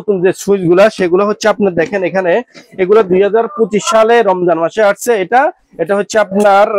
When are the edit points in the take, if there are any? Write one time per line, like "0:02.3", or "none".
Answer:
none

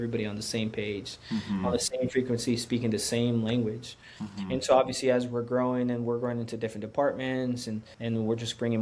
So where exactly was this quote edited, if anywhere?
0:07.9

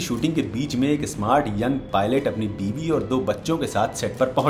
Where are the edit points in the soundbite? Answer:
none

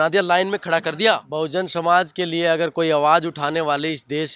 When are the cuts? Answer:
0:01.3

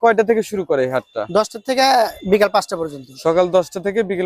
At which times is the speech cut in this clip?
0:02.2

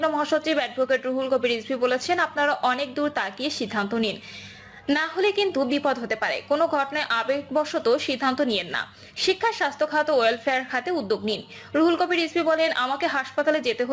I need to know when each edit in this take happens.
none

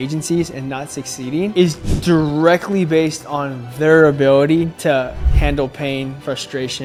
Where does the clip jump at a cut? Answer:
none

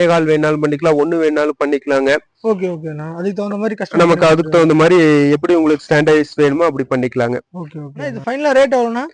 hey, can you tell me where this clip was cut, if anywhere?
none

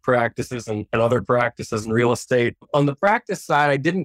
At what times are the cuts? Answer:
0:02.7

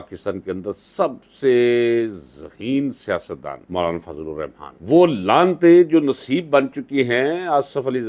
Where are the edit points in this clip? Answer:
0:04.7

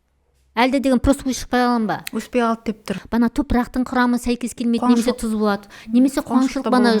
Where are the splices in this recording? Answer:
0:03.0

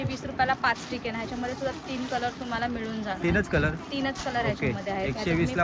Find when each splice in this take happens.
none

